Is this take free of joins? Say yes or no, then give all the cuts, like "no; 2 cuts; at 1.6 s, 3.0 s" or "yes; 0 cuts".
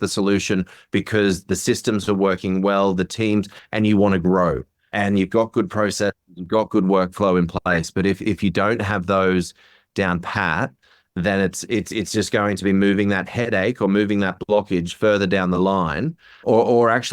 yes; 0 cuts